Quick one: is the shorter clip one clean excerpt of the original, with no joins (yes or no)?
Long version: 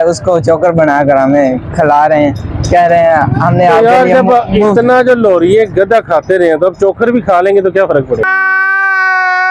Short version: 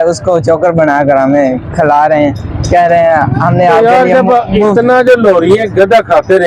yes